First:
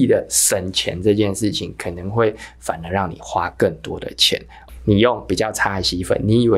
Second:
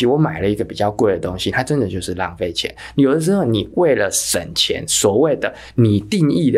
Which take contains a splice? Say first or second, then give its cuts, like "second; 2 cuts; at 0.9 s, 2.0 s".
first; 1 cut; at 4.5 s